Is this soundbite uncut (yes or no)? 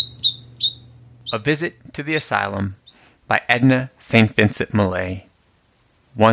no